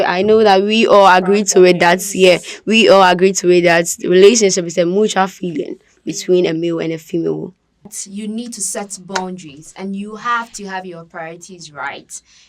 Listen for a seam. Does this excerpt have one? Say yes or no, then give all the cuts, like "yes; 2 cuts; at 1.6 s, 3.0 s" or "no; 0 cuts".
yes; 1 cut; at 7.9 s